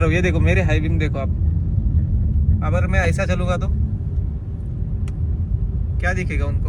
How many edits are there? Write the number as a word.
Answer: zero